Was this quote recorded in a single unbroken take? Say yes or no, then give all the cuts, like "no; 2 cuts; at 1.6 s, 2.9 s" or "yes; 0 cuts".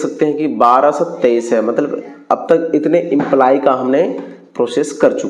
yes; 0 cuts